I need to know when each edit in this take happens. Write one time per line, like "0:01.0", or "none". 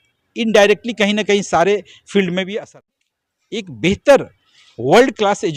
0:03.0